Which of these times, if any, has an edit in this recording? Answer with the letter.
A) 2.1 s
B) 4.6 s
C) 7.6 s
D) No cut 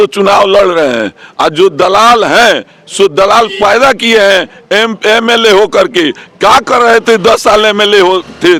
D